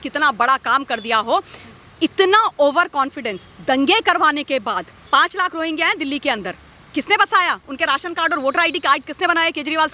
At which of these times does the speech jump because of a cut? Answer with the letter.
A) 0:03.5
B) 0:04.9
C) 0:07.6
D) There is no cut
B